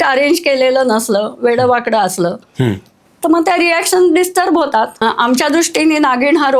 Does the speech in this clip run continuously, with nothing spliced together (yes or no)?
no